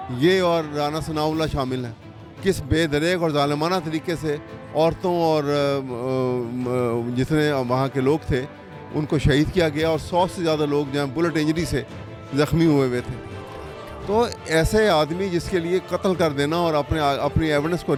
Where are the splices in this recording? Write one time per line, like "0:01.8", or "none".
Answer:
none